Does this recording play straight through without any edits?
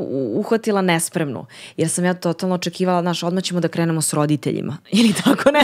yes; 0 cuts

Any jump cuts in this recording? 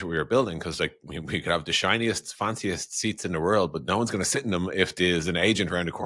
no; 0 cuts

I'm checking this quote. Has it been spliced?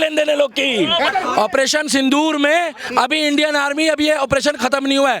yes; 1 cut; at 1.1 s

